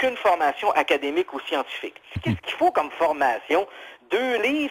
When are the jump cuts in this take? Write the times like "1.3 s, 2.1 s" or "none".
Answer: 2.1 s